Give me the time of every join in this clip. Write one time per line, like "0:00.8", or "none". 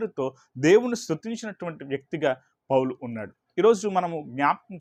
none